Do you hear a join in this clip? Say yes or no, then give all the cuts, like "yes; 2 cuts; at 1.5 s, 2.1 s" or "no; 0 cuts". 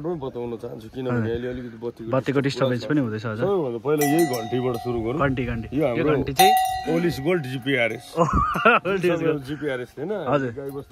no; 0 cuts